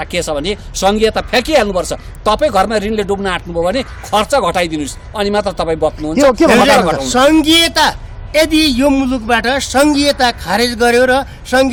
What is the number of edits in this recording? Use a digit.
0